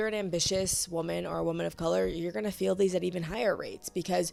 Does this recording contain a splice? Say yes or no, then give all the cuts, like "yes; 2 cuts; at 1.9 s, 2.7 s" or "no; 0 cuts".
no; 0 cuts